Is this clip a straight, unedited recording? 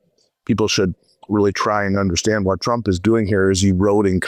yes; 0 cuts

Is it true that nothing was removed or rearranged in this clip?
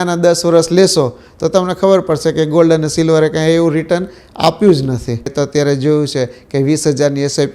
no; 1 cut; at 5.3 s

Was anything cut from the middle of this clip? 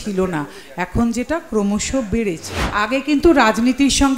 yes; 1 cut; at 2.7 s

